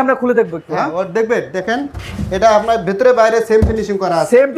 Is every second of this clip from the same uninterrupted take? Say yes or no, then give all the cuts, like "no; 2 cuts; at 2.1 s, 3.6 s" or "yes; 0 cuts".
yes; 0 cuts